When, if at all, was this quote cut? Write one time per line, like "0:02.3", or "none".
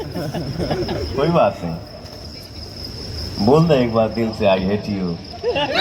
none